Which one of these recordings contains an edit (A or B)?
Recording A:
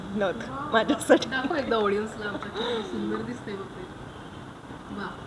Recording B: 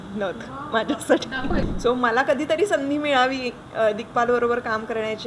B